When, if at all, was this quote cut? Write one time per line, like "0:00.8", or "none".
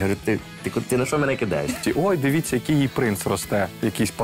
0:01.8